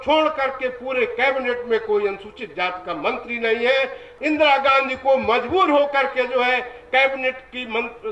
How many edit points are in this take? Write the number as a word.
one